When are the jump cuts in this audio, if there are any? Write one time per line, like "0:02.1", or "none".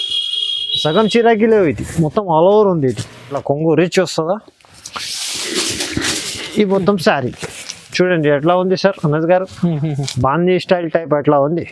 0:03.4